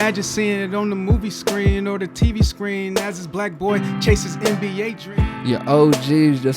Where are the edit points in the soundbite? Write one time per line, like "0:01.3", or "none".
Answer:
0:05.0